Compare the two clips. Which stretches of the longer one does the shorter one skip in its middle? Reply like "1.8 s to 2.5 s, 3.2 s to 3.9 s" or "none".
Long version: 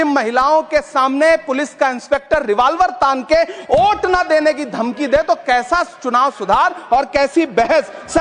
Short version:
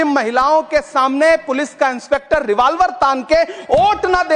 none

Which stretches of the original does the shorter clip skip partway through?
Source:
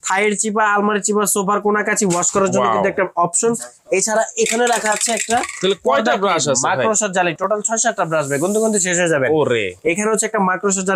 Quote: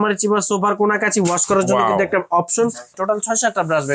3.8 s to 7.4 s

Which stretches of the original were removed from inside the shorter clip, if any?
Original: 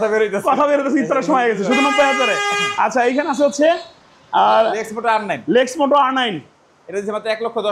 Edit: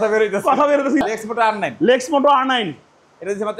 1.1 s to 4.7 s

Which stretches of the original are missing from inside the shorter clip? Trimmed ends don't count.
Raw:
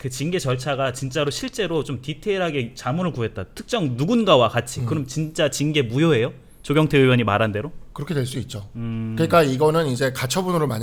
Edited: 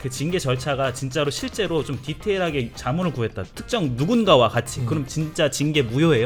none

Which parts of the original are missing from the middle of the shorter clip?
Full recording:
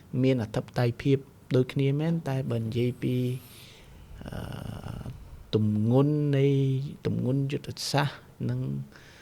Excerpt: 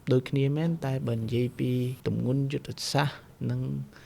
3.4 s to 6.9 s

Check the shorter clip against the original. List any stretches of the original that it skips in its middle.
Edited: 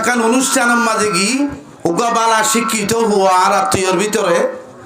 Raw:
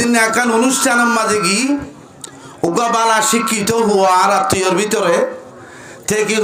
1.9 s to 2.4 s

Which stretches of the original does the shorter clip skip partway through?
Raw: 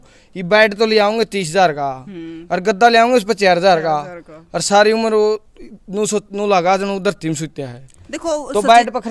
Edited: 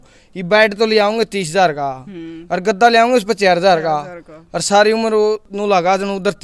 5.5 s to 6.3 s

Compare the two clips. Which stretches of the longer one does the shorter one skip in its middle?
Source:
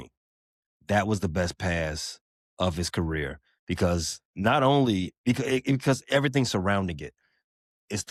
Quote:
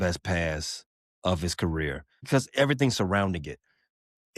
3.6 s to 5.8 s

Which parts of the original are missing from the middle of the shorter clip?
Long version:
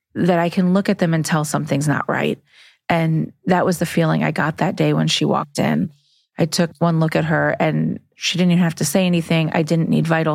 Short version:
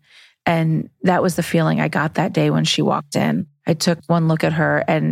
6.0 s to 6.2 s

